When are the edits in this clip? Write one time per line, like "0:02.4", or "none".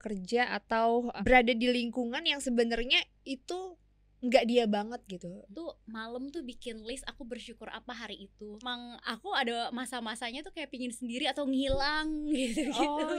0:01.1
0:05.5
0:08.7